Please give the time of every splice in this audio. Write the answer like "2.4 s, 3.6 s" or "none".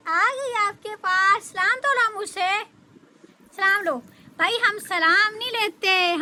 none